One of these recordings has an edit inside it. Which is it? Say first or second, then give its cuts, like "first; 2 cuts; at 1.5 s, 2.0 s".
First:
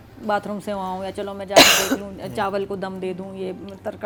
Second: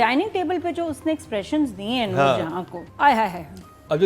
second; 1 cut; at 2.8 s